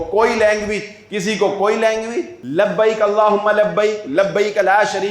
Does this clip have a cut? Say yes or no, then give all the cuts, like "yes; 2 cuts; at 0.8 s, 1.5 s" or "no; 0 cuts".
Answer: yes; 1 cut; at 2.4 s